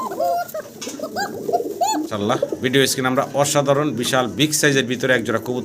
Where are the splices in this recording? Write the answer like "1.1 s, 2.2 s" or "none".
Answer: 2.1 s